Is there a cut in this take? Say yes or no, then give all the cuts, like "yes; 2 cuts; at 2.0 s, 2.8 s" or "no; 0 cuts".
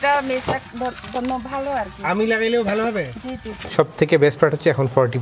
yes; 1 cut; at 3.6 s